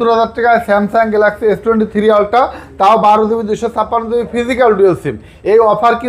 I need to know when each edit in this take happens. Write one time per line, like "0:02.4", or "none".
none

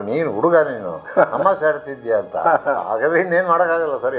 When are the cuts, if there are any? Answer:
0:02.4

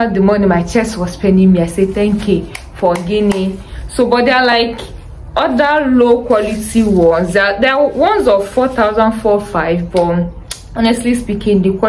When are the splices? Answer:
none

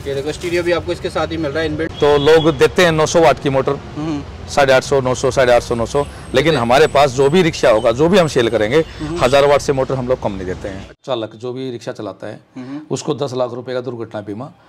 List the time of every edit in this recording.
0:01.9
0:11.0

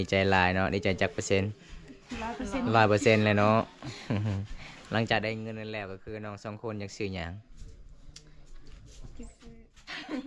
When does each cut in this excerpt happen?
none

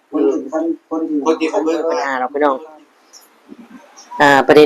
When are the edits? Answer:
0:02.1

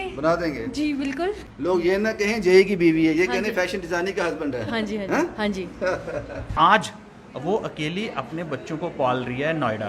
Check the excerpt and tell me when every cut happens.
0:01.4
0:06.5

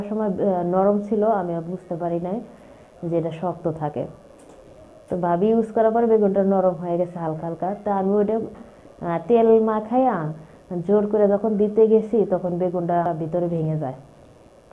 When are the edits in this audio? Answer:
0:13.1

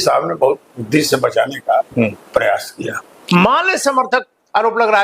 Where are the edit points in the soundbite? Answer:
0:03.1

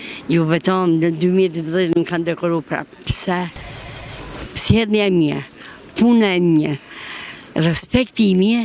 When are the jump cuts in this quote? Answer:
0:04.0

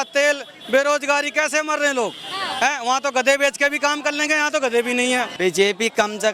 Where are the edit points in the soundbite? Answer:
0:05.3

